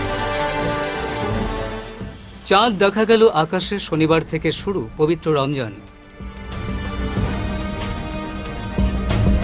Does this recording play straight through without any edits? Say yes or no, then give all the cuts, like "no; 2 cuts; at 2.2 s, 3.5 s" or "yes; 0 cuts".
no; 1 cut; at 1.4 s